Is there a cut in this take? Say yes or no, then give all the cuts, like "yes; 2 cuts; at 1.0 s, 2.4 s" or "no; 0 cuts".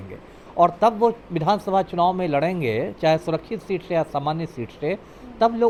no; 0 cuts